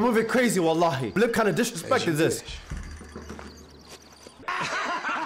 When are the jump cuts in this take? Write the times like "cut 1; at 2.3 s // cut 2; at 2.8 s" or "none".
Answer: cut 1; at 1.1 s // cut 2; at 4.4 s